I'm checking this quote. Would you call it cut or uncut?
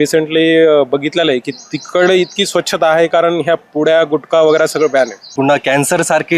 cut